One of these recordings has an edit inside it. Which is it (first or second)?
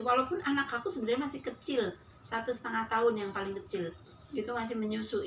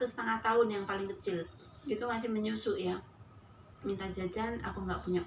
second